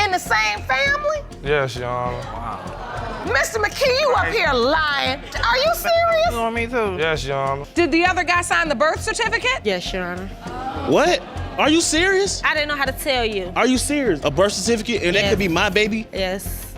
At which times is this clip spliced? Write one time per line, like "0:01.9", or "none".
0:07.6
0:14.2